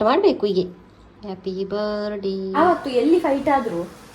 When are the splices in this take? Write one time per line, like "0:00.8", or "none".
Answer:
0:02.6